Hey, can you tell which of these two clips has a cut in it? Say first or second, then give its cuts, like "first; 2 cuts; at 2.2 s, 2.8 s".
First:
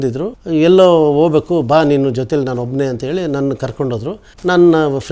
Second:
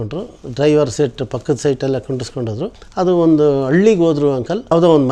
second; 1 cut; at 2.8 s